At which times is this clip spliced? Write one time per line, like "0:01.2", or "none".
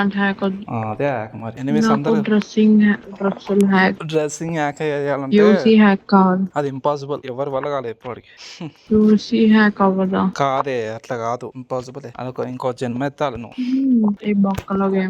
0:14.2